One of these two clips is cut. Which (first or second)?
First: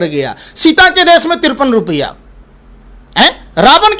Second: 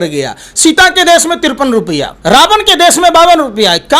second